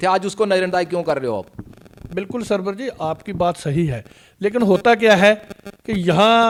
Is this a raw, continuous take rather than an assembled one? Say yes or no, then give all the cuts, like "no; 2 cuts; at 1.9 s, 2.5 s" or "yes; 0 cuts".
yes; 0 cuts